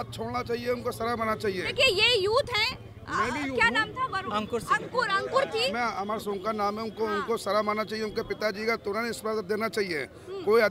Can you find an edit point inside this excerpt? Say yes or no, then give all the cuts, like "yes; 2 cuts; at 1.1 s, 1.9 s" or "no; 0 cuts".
no; 0 cuts